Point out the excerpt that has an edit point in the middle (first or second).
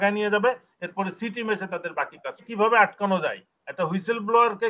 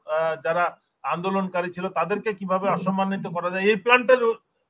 first